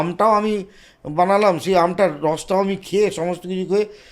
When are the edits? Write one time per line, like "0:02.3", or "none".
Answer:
none